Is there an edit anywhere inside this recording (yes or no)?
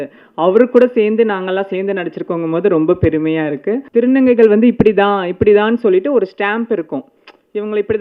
yes